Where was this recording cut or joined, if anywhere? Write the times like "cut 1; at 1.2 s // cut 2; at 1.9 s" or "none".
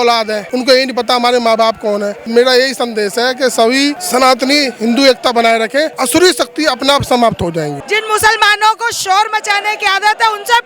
cut 1; at 2.2 s // cut 2; at 4.0 s // cut 3; at 6.0 s // cut 4; at 7.8 s